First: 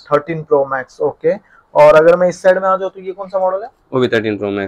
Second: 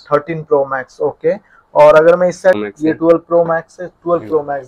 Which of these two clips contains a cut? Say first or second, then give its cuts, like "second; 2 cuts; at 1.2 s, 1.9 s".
second; 1 cut; at 2.6 s